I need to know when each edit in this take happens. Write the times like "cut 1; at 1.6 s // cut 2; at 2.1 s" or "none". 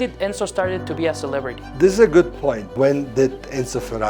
cut 1; at 1.6 s // cut 2; at 2.7 s